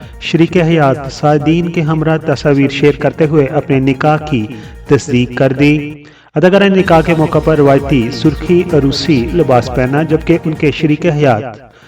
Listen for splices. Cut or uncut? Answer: uncut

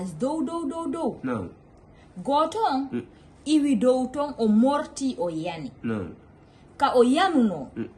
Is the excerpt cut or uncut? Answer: uncut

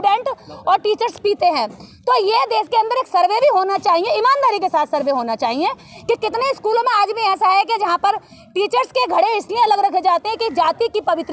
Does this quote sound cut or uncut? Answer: uncut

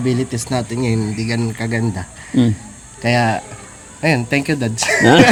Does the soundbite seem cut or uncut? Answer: uncut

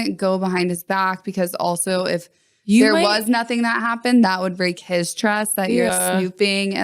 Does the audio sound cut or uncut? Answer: cut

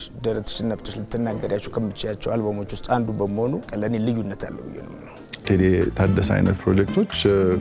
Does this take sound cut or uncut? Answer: cut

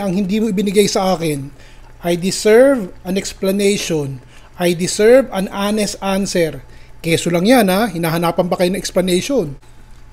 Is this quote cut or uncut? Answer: uncut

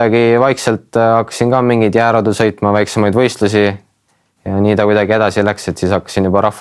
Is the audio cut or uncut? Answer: uncut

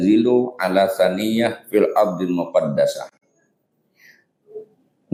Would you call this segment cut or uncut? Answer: uncut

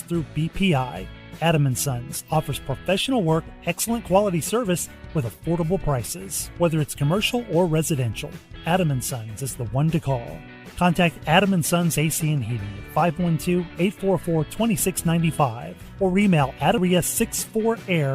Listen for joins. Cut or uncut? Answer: cut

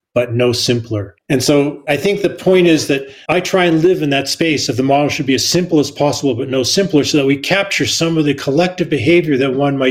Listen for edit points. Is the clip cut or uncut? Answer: uncut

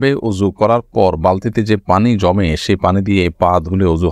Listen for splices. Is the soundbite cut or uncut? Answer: uncut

